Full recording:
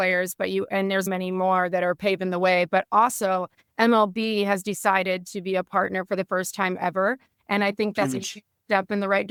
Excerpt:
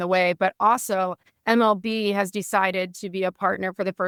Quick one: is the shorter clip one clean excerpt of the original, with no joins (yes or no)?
yes